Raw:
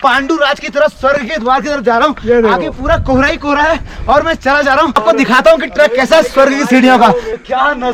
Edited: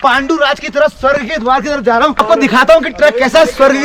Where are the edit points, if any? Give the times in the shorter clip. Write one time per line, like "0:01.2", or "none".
0:02.2